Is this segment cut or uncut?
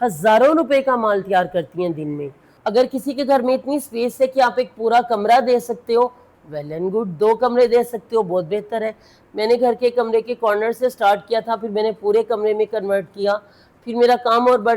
cut